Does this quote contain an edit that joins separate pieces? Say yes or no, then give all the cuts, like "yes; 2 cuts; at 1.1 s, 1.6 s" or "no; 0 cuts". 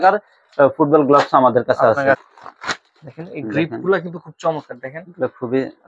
no; 0 cuts